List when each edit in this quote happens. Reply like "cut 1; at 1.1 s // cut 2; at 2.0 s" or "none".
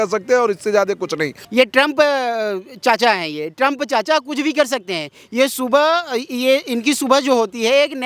cut 1; at 1.4 s